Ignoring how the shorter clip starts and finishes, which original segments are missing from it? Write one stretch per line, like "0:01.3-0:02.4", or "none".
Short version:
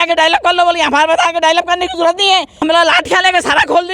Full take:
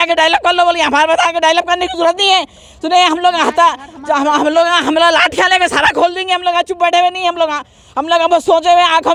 0:02.6-0:04.8